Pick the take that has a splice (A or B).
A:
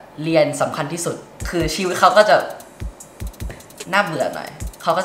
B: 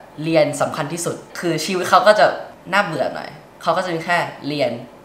B